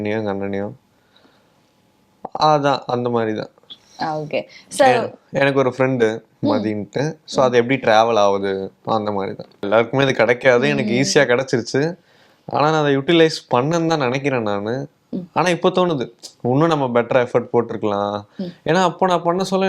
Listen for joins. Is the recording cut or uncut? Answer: cut